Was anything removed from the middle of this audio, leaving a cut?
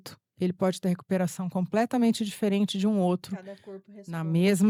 no; 0 cuts

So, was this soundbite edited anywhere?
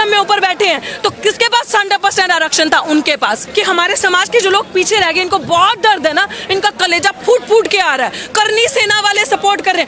yes; 1 cut; at 3.4 s

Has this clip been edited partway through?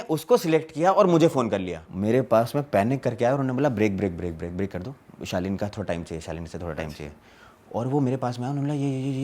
yes; 1 cut; at 1.8 s

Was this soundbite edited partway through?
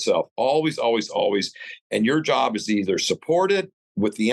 no; 0 cuts

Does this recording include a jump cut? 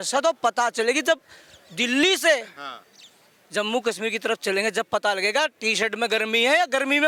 no; 0 cuts

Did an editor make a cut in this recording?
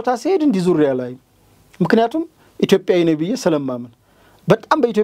no; 0 cuts

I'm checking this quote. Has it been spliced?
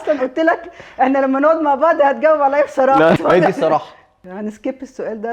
yes; 2 cuts; at 3.2 s, 4.3 s

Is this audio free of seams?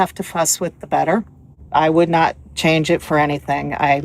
no; 1 cut; at 1.4 s

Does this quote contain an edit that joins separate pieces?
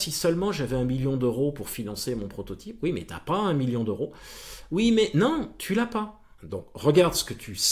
no; 0 cuts

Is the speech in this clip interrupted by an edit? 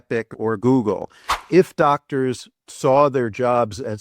yes; 1 cut; at 1.4 s

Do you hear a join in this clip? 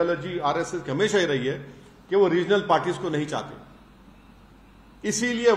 no; 0 cuts

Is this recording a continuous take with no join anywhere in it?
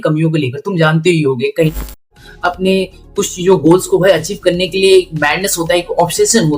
no; 1 cut; at 2.0 s

